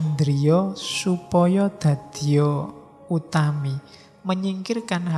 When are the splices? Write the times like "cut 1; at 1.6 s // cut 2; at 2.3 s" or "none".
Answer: none